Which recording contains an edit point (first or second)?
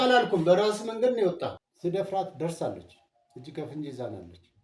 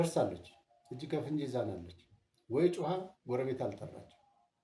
first